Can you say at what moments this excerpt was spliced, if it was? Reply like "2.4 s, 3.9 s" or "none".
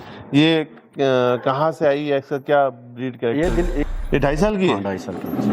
3.8 s